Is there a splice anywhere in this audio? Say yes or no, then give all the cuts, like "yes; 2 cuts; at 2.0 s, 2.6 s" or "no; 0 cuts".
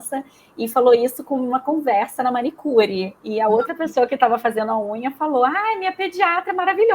no; 0 cuts